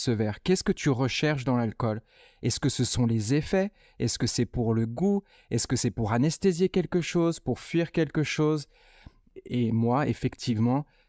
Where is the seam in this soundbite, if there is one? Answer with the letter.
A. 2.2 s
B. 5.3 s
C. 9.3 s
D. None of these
C